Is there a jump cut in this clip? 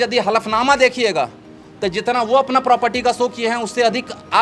no; 0 cuts

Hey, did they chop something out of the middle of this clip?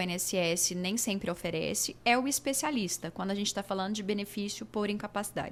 no; 0 cuts

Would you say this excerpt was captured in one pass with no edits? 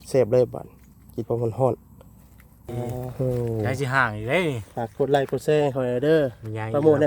no; 1 cut; at 3.7 s

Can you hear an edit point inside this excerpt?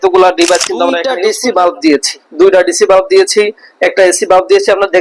yes; 1 cut; at 1.1 s

